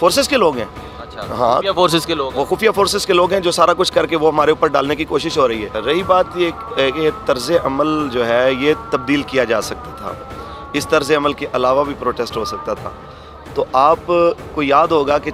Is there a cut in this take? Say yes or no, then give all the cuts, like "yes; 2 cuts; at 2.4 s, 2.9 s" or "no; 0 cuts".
no; 0 cuts